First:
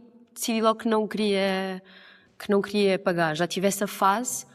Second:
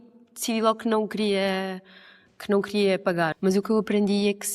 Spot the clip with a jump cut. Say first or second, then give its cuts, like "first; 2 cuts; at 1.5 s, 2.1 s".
second; 1 cut; at 3.3 s